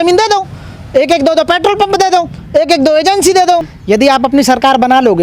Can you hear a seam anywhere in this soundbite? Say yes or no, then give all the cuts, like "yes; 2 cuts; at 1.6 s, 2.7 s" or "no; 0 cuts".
yes; 1 cut; at 3.7 s